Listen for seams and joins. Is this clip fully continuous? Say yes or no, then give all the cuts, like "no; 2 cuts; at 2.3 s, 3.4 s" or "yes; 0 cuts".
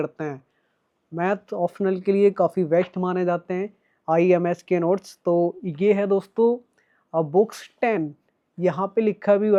yes; 0 cuts